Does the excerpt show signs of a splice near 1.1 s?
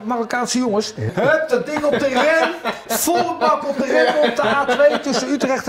yes; 1 cut; at 1.1 s

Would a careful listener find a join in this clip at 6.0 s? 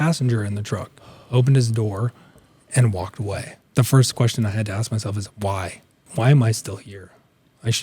yes; 2 cuts; at 3.6 s, 6.0 s

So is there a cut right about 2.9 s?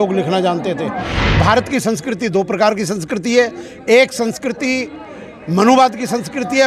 no; 1 cut; at 1.2 s

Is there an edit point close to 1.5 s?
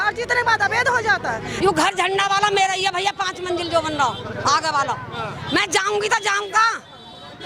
yes; 1 cut; at 1.5 s

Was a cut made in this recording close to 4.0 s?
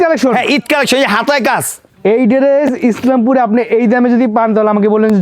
no; 1 cut; at 1.8 s

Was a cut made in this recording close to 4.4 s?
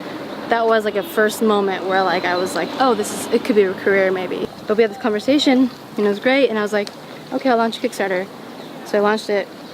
yes; 1 cut; at 4.4 s

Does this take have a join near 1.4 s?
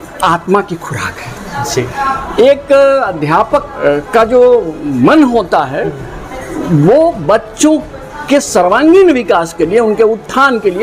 no; 0 cuts

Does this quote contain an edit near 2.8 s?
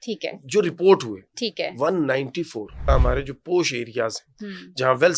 yes; 1 cut; at 2.8 s

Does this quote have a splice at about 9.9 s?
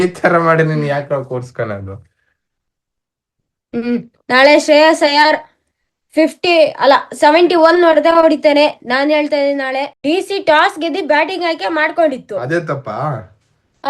yes; 1 cut; at 9.9 s

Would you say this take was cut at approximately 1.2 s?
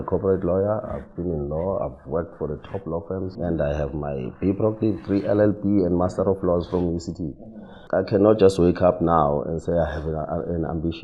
no; 2 cuts; at 3.3 s, 7.8 s

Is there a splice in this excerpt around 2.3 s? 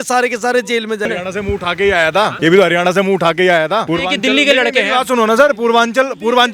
yes; 3 cuts; at 1.1 s, 2.3 s, 3.9 s

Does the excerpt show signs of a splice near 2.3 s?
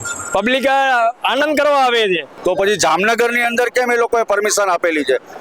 yes; 1 cut; at 2.3 s

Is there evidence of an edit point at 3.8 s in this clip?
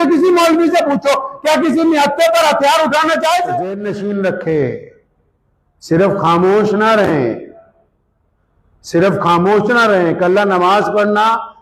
yes; 1 cut; at 3.8 s

